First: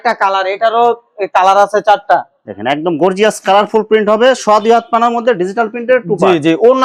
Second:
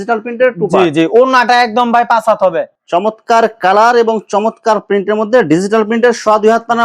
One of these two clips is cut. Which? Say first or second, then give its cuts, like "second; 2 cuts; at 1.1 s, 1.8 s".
second; 1 cut; at 2.7 s